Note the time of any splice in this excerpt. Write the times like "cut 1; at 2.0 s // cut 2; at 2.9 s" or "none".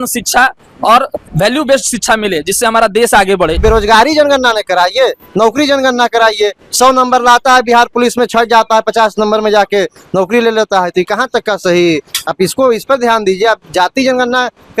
cut 1; at 1.2 s // cut 2; at 3.6 s